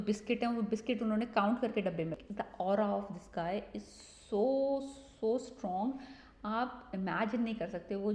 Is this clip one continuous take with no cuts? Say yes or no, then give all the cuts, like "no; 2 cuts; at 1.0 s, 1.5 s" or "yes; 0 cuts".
no; 1 cut; at 2.2 s